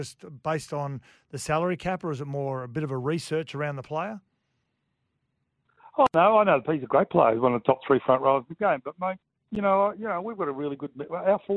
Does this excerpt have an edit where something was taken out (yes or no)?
no